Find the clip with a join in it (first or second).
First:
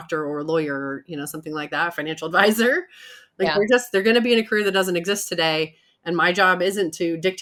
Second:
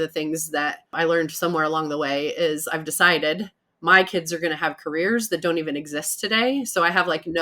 second